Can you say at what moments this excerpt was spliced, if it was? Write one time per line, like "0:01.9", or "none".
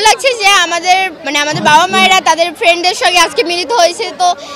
0:01.2